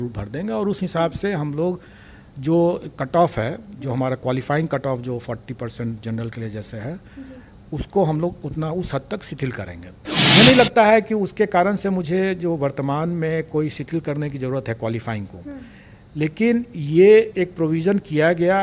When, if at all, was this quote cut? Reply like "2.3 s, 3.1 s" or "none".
10.2 s